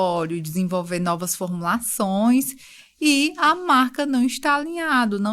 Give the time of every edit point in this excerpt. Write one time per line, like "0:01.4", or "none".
none